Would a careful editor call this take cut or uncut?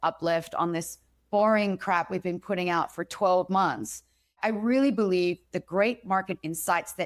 uncut